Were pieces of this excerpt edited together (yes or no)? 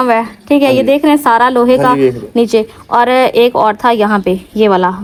no